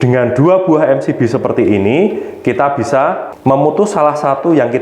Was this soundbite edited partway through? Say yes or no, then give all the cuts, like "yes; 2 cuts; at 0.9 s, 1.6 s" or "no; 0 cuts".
yes; 1 cut; at 3.3 s